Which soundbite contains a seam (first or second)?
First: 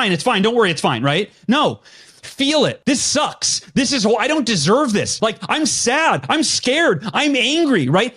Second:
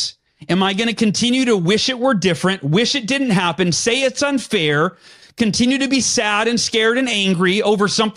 first